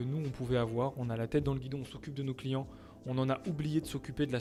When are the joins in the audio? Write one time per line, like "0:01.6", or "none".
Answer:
none